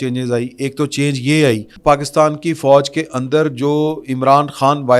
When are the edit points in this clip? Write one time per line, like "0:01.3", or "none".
0:01.7